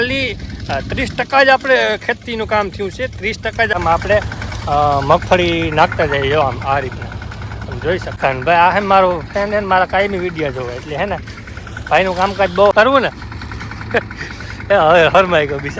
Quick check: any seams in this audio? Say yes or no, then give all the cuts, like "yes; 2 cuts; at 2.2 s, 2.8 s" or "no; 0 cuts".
yes; 3 cuts; at 3.7 s, 8.2 s, 12.7 s